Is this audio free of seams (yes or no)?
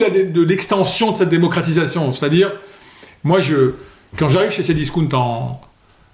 yes